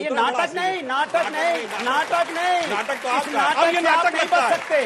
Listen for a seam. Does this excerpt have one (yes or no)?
no